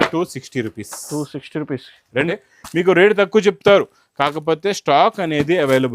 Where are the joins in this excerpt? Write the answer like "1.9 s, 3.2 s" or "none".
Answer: 2.3 s

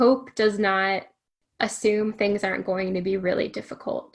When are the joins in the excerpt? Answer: 1.4 s

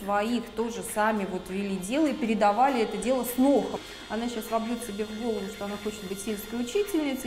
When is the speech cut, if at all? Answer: 3.8 s

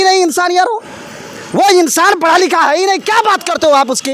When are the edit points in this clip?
none

